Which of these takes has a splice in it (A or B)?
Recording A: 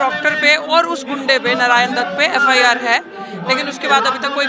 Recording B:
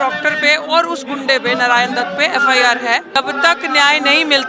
B